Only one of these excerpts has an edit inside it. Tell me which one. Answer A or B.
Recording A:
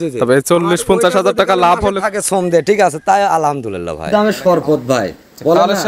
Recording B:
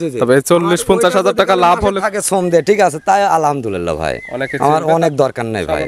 A